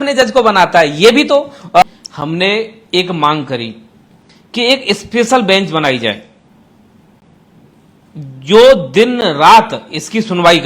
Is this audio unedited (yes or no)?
no